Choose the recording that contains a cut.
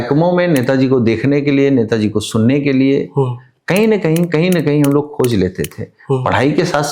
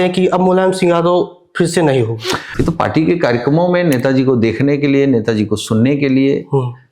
second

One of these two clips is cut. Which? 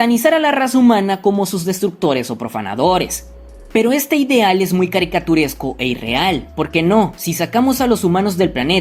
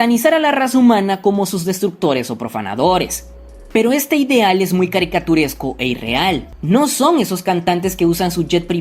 second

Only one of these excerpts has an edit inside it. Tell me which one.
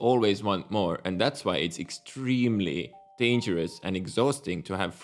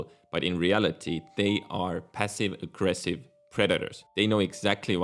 second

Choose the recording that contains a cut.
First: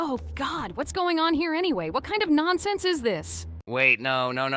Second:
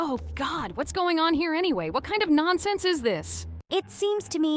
first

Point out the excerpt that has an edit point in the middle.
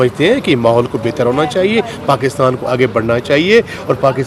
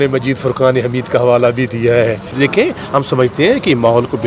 second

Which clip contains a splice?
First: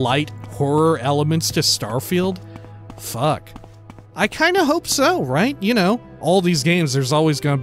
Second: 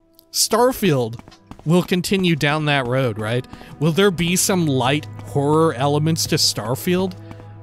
first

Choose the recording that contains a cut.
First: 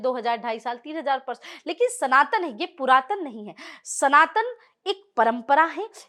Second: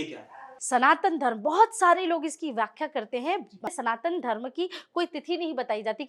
second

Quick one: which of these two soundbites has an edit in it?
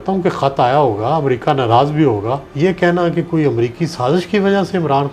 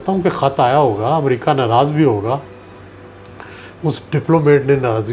first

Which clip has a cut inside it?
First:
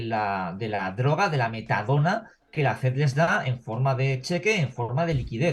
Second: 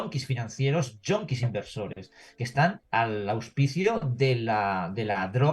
second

